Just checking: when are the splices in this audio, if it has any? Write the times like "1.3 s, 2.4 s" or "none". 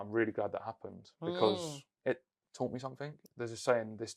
3.2 s